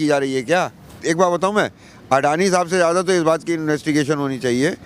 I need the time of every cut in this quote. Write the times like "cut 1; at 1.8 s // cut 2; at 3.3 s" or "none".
cut 1; at 0.9 s